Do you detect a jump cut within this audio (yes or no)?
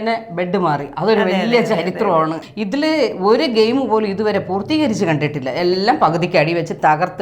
yes